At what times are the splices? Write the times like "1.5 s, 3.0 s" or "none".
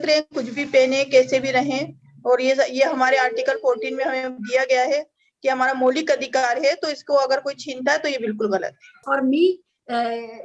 9.0 s